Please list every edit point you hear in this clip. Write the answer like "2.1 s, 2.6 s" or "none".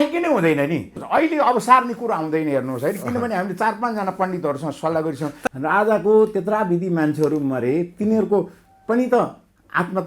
1.0 s, 5.5 s

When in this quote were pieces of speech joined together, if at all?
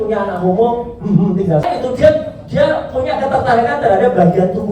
1.6 s

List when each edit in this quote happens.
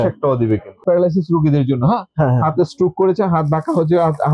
0.9 s

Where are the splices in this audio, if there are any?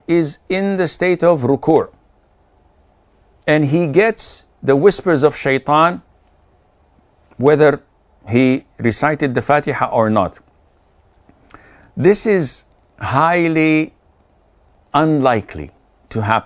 none

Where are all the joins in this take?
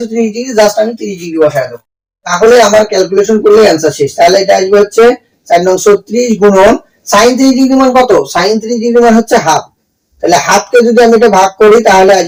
none

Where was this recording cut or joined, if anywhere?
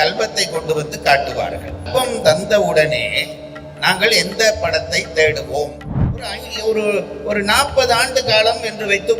1.9 s, 6.2 s

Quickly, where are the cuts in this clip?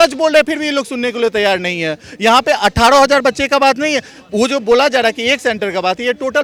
none

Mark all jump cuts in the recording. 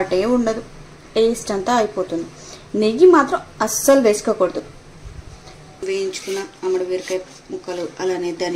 5.8 s

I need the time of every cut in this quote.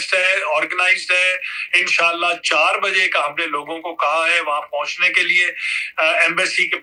none

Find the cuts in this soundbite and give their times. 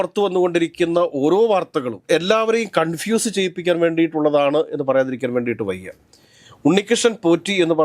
none

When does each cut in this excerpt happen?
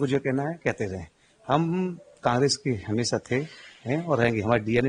none

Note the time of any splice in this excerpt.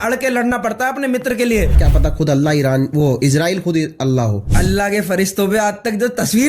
1.9 s, 4.5 s

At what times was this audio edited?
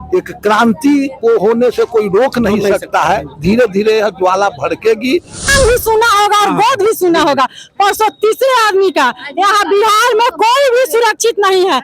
5.5 s

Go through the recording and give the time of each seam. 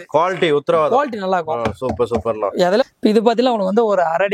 2.8 s

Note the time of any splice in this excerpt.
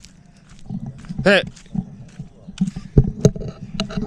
none

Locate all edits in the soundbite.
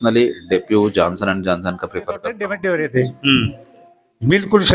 2.5 s

